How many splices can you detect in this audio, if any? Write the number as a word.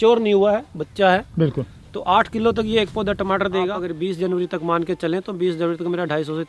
one